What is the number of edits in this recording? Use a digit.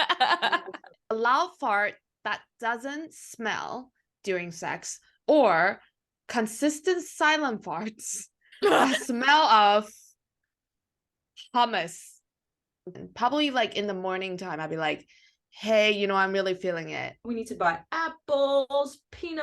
3